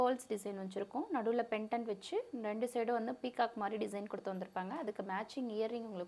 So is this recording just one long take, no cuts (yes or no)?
yes